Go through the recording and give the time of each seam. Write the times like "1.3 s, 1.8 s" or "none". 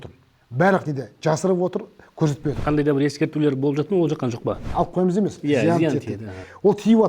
2.6 s, 4.6 s